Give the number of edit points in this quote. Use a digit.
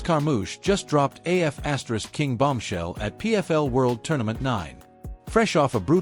0